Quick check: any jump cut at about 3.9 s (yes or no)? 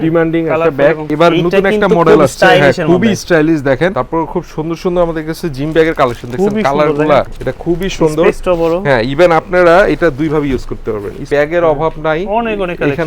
yes